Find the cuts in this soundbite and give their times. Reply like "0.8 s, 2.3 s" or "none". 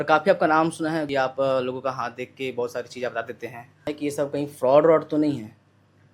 1.1 s, 3.9 s